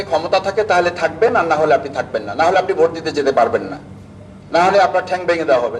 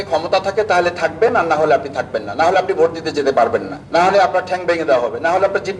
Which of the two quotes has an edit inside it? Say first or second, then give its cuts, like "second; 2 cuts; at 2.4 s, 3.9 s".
second; 1 cut; at 3.8 s